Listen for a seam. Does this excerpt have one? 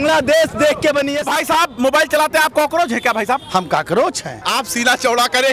yes; 2 cuts; at 1.3 s, 4.4 s

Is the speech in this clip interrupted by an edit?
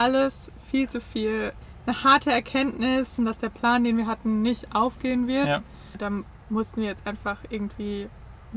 yes; 3 cuts; at 1.6 s, 3.1 s, 6.0 s

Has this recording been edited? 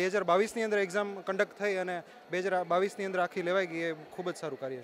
no; 0 cuts

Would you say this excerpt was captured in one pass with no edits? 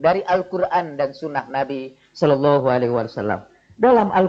yes; 0 cuts

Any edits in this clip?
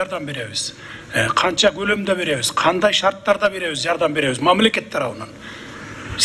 no; 0 cuts

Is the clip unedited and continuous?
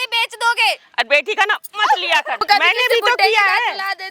no; 1 cut; at 2.4 s

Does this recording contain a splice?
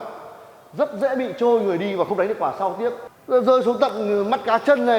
yes; 1 cut; at 3.1 s

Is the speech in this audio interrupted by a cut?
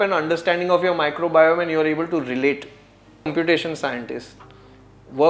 yes; 1 cut; at 3.3 s

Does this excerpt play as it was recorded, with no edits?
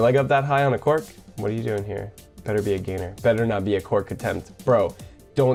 yes; 0 cuts

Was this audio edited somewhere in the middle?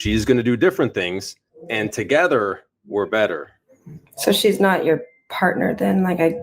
yes; 1 cut; at 3.5 s

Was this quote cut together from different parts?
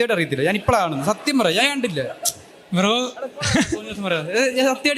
no; 0 cuts

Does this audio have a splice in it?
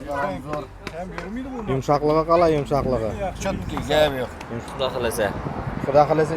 yes; 1 cut; at 4.6 s

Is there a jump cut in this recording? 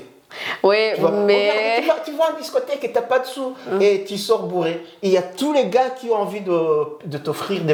no; 0 cuts

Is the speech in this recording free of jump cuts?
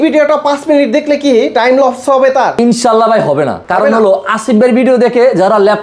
no; 1 cut; at 2.5 s

